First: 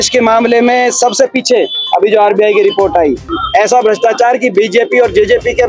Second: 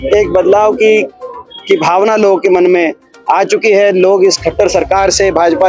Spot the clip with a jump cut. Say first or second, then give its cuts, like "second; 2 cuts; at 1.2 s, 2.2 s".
first; 1 cut; at 3.3 s